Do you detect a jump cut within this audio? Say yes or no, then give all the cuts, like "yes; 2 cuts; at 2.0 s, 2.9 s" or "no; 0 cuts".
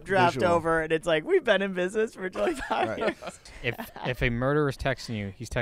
yes; 1 cut; at 3.4 s